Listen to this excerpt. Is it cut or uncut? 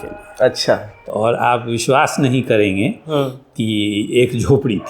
cut